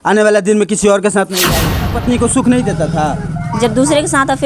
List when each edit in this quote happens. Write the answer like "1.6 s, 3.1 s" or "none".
1.9 s